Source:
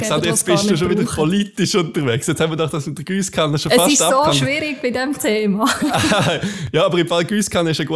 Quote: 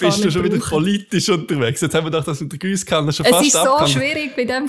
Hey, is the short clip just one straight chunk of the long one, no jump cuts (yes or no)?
yes